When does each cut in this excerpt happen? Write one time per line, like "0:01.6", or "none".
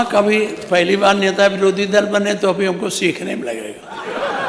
none